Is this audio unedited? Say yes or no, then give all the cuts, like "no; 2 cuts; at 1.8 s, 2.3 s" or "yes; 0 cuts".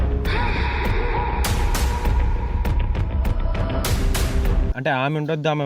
no; 1 cut; at 4.7 s